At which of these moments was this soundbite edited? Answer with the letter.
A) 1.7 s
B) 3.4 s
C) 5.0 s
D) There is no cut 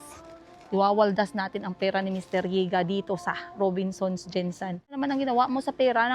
C